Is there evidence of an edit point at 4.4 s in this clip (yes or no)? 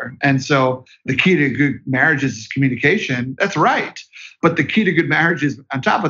no